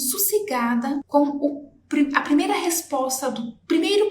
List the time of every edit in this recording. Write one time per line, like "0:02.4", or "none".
0:01.0